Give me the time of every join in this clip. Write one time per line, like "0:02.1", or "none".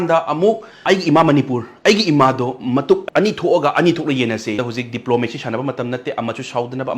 0:04.6